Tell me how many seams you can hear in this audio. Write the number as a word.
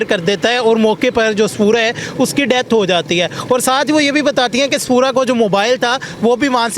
zero